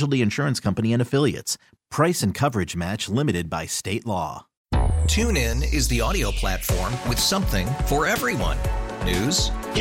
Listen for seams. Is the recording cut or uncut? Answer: cut